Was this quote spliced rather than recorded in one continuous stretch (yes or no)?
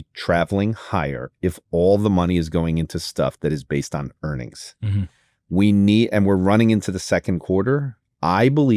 no